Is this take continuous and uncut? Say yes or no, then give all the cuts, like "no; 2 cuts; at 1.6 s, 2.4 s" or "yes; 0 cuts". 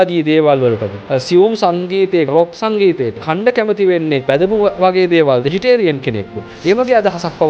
no; 5 cuts; at 0.9 s, 2.3 s, 3.2 s, 4.2 s, 5.5 s